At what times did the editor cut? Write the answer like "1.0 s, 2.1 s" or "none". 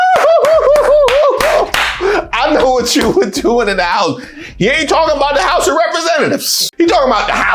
6.6 s